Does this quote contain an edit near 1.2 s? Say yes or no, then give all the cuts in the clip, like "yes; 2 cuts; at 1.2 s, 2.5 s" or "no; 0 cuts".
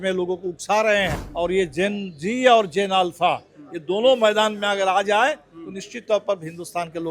yes; 1 cut; at 1.2 s